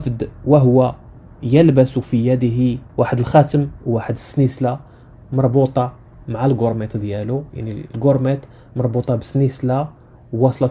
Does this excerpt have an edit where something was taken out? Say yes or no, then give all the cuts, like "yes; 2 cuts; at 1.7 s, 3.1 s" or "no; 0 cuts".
yes; 1 cut; at 2.8 s